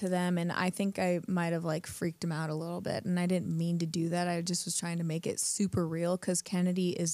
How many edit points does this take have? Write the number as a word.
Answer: zero